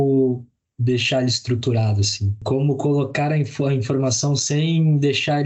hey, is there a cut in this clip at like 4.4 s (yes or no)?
no